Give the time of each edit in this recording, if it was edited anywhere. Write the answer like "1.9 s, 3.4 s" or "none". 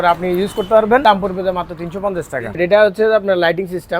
1.0 s, 2.6 s